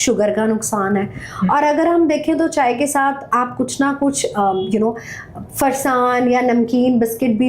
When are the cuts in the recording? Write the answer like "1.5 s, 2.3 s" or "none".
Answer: none